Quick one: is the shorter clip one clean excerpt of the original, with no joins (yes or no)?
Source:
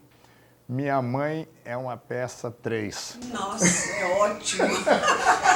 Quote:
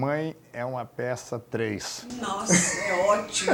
yes